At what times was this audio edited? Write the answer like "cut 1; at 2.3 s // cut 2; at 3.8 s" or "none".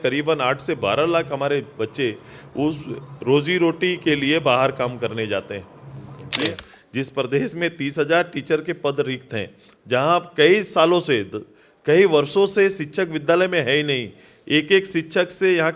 cut 1; at 6.3 s